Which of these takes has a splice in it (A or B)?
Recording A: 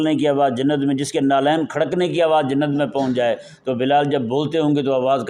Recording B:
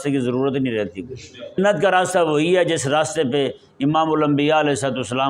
B